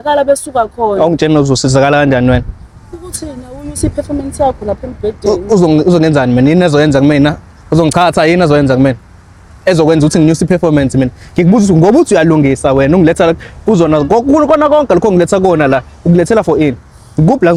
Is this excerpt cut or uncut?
uncut